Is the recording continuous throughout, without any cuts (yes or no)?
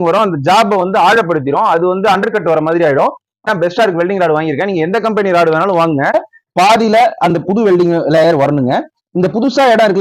no